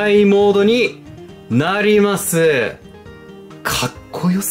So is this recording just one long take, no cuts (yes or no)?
yes